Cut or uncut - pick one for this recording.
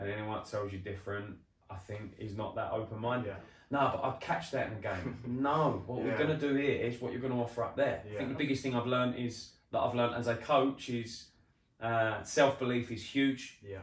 cut